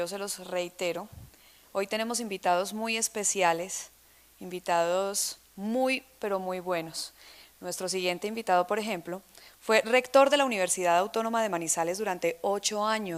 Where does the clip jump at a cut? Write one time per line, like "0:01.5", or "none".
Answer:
none